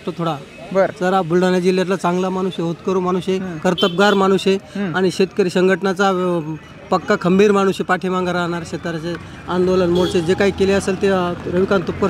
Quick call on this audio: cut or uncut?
uncut